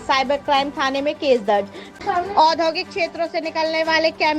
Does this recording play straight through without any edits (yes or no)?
no